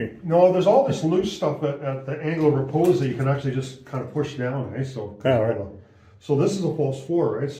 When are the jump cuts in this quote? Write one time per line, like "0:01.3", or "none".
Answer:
none